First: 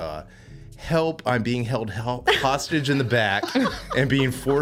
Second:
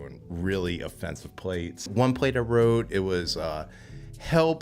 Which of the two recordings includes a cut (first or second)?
second